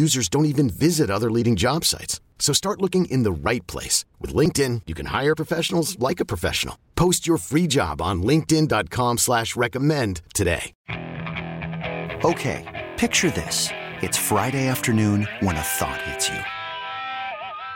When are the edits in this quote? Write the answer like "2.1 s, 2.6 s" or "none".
10.8 s

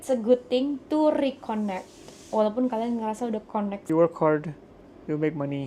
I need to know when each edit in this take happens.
3.8 s

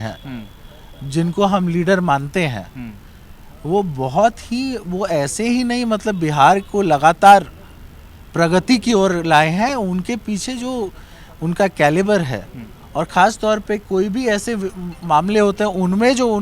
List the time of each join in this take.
none

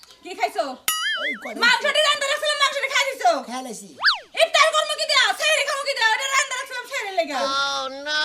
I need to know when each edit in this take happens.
7.3 s

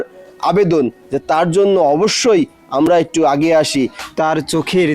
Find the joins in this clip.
4.0 s

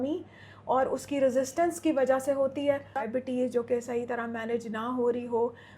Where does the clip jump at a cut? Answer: 3.0 s

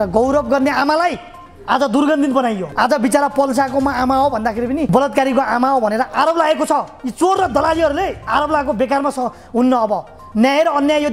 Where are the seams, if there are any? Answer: 2.7 s, 4.9 s

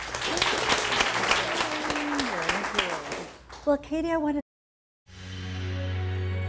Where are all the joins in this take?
none

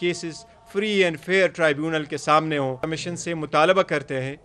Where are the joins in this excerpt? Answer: 2.8 s

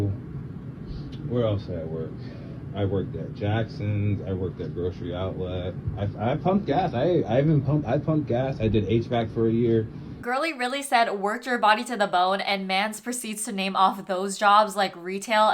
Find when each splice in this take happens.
10.2 s

